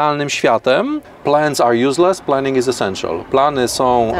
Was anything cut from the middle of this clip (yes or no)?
yes